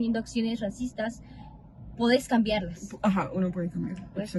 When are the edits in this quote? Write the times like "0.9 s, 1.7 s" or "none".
none